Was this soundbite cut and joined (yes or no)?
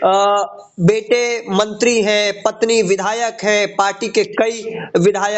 no